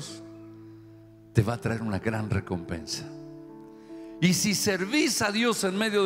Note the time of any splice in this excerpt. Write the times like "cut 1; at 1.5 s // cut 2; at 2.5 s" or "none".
none